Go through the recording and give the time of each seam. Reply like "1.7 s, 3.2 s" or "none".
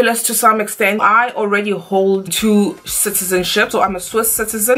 1.0 s, 2.3 s, 3.9 s